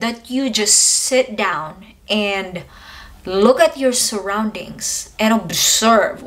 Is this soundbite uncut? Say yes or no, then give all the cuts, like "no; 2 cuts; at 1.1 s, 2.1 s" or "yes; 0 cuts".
yes; 0 cuts